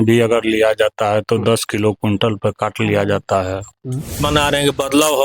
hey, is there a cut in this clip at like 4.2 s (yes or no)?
yes